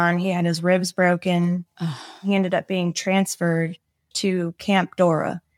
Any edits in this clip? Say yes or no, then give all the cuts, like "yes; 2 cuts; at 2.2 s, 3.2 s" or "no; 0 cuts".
yes; 2 cuts; at 2.2 s, 4.1 s